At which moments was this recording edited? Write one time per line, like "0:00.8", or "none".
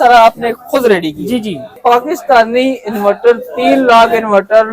0:01.8